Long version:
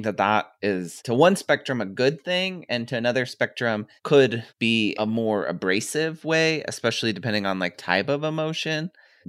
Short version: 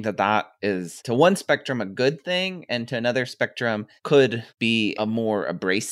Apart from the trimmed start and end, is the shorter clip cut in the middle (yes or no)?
no